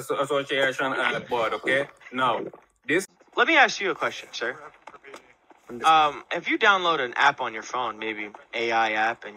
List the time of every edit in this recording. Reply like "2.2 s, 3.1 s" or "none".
3.1 s